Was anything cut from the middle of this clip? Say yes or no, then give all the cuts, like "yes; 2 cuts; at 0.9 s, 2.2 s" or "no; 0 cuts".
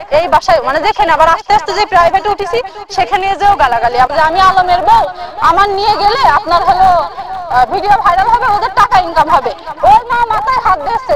yes; 1 cut; at 4.1 s